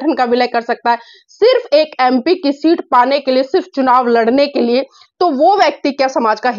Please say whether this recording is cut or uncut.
uncut